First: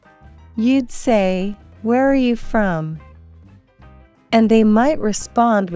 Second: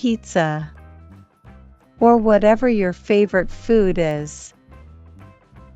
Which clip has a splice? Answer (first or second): second